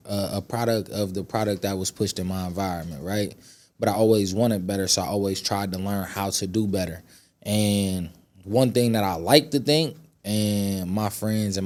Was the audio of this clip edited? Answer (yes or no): no